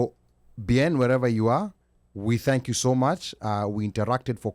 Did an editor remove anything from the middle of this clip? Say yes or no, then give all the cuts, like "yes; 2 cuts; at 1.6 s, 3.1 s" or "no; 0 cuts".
no; 0 cuts